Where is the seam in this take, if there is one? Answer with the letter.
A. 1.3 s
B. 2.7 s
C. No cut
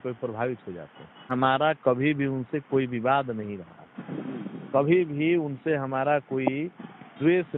A